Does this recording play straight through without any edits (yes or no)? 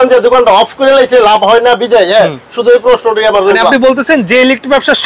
no